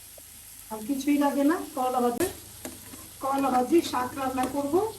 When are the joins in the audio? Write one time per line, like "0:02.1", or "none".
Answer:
0:02.2

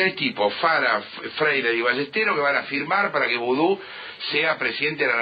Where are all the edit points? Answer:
none

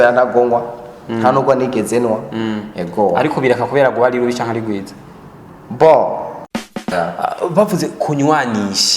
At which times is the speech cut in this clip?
0:06.6

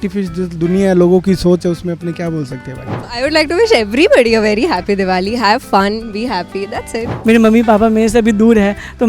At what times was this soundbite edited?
0:02.9
0:07.0

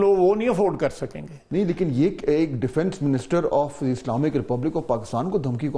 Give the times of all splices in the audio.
none

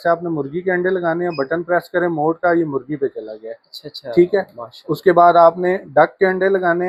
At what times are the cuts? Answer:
none

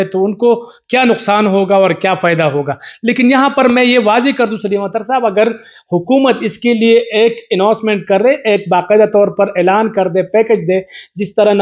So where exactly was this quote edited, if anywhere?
none

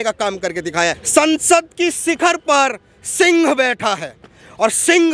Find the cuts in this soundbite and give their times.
0:01.0

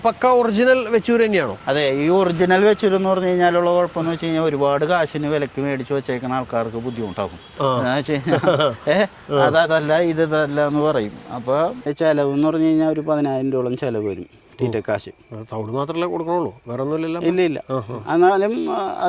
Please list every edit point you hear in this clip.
0:01.6
0:11.9

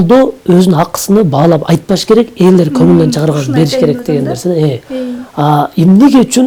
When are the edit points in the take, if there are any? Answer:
none

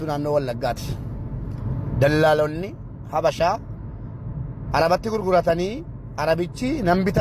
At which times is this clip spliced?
none

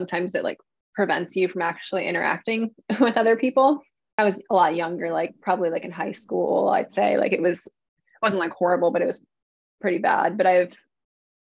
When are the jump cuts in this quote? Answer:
0:04.0

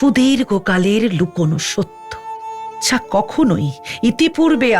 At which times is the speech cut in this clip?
0:02.2

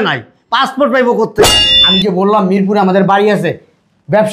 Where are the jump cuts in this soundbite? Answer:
0:01.5

